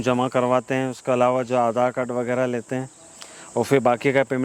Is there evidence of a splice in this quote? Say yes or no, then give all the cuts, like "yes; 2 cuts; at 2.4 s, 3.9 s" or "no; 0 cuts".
no; 0 cuts